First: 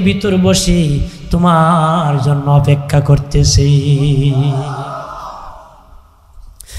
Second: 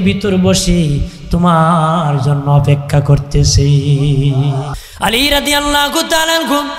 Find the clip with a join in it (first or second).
second